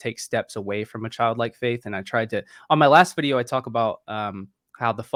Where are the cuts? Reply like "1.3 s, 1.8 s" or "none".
none